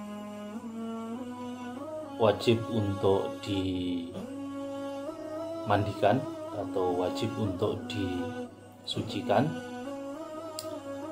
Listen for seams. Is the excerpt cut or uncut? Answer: cut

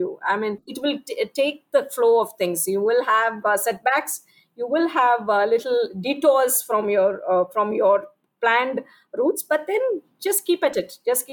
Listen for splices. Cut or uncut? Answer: uncut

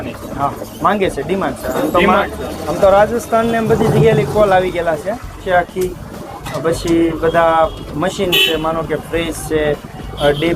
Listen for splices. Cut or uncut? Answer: cut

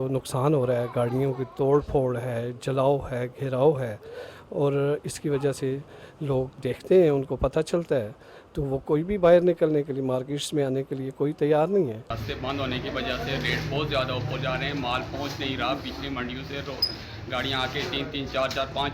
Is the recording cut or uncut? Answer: cut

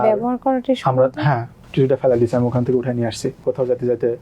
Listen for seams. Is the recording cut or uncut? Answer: cut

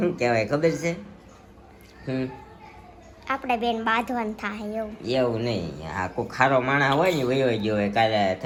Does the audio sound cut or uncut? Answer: uncut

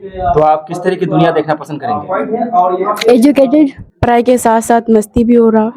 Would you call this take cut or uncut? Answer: cut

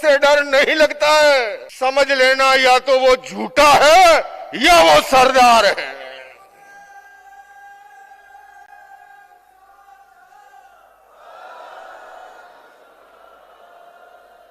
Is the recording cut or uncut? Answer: cut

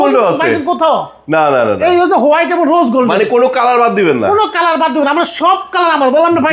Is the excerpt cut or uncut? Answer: uncut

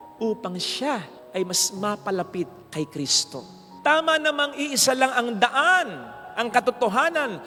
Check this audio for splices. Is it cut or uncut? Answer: uncut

